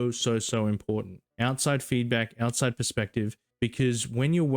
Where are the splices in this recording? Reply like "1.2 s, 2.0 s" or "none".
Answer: 1.2 s, 3.4 s